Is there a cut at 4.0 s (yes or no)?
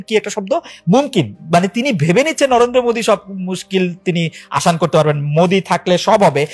no